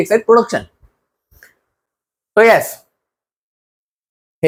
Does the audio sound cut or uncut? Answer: uncut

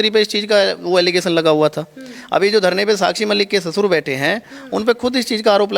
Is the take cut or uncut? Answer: uncut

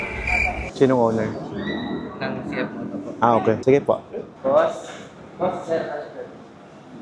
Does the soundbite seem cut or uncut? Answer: uncut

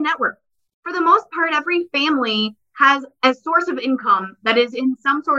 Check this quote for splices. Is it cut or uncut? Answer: uncut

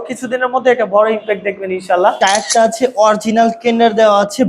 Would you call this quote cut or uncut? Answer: cut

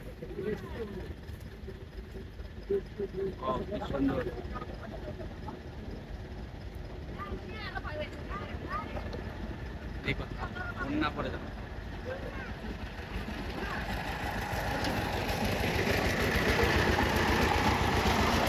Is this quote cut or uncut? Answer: uncut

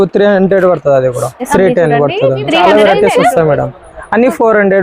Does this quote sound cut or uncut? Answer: cut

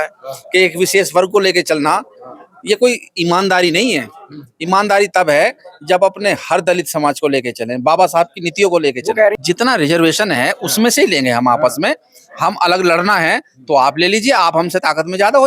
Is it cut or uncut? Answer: cut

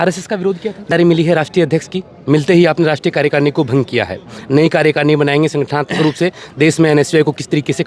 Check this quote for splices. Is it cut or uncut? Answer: cut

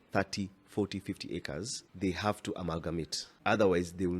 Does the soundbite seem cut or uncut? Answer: cut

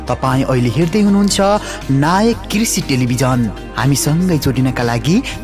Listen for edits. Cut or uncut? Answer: uncut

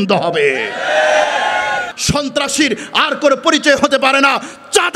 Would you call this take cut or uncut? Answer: cut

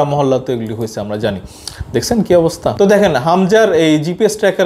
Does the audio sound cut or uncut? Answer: cut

